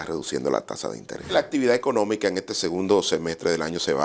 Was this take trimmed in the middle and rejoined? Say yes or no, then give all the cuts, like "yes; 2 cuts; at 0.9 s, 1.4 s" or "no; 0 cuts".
yes; 1 cut; at 1.3 s